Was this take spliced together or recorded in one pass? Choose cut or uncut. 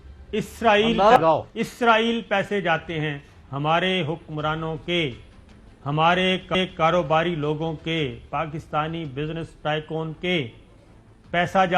cut